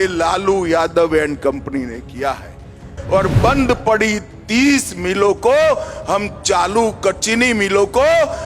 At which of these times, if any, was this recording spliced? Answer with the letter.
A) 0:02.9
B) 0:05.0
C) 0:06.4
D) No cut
A